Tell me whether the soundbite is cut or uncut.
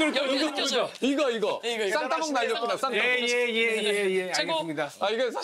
uncut